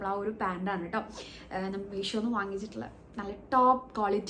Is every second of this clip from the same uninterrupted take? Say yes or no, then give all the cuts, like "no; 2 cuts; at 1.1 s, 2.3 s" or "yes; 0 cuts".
yes; 0 cuts